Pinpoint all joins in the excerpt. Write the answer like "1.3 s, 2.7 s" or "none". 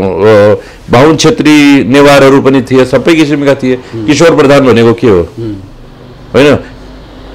none